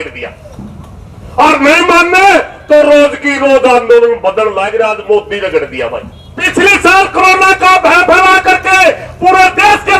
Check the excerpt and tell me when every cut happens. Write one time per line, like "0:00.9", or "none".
0:06.5